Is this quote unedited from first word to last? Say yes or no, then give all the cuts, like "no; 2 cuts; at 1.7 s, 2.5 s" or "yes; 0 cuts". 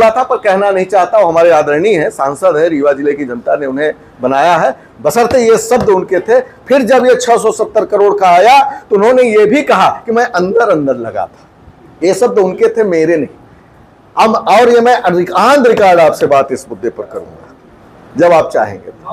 yes; 0 cuts